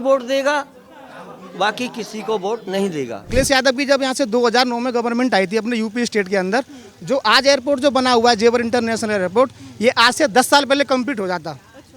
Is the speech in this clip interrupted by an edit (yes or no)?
yes